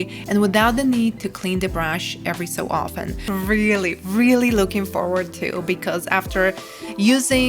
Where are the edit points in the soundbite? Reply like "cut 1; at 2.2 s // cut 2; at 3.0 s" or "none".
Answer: cut 1; at 3.3 s